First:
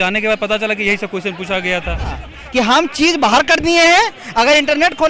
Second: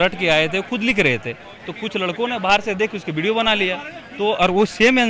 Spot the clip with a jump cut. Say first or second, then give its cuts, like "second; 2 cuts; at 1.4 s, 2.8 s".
first; 1 cut; at 2.3 s